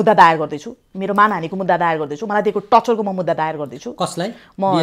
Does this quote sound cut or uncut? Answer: uncut